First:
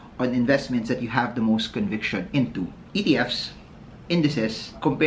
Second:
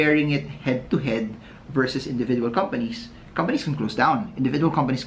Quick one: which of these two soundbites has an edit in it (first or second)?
first